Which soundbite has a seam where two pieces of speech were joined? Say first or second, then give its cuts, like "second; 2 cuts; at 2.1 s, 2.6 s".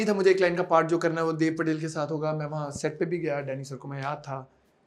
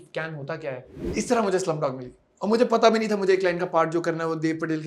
second; 1 cut; at 1.0 s